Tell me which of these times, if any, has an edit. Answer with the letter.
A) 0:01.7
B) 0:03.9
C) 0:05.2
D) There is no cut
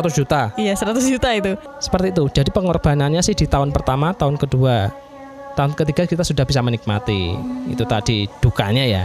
A